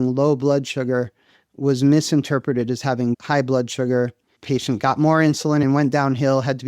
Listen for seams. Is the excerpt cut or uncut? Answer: cut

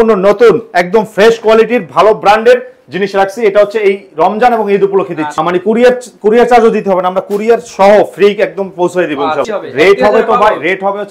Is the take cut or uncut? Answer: cut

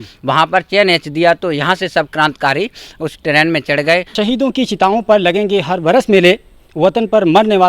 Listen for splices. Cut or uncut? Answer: cut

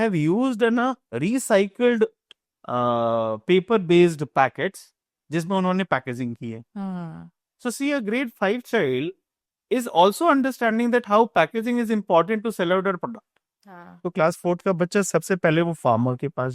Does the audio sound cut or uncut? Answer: cut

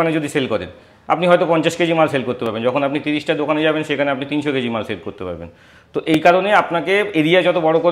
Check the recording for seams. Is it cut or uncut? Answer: uncut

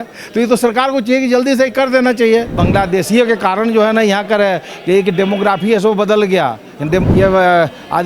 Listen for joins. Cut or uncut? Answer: cut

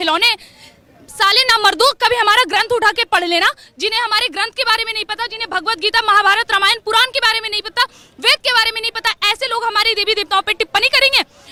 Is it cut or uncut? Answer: uncut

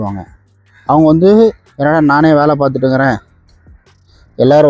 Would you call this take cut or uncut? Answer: cut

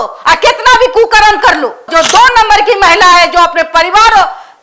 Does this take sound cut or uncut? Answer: cut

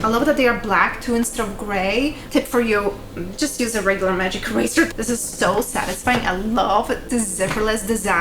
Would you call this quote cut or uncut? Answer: cut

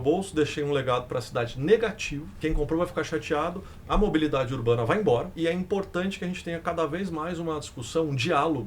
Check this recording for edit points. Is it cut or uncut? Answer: cut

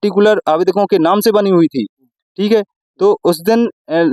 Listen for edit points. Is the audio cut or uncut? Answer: uncut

